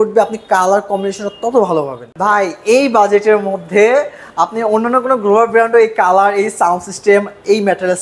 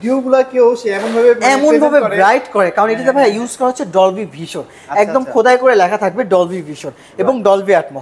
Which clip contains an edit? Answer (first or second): first